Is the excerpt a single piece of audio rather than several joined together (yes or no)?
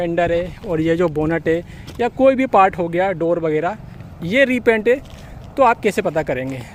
yes